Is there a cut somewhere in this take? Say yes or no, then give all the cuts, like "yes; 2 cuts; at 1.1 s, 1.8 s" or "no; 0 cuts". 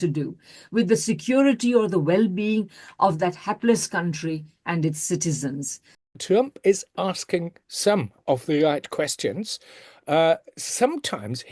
yes; 1 cut; at 6.1 s